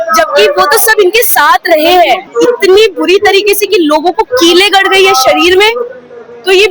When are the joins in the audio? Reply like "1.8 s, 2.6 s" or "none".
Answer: 2.3 s